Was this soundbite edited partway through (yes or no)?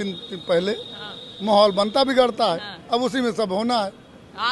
no